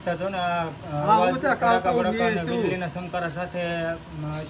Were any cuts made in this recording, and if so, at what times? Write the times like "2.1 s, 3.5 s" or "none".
none